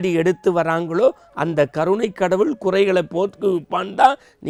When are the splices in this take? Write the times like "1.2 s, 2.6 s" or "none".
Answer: none